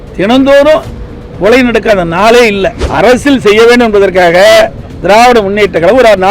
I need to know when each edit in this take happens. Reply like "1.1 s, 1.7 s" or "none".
2.8 s